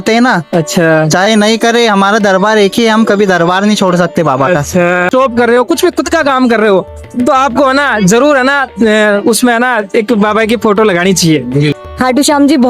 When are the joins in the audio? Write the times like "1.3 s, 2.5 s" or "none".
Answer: 5.1 s, 11.8 s